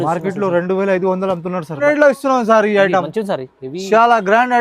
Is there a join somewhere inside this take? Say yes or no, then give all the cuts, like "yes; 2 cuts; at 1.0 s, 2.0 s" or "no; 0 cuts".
yes; 1 cut; at 1.8 s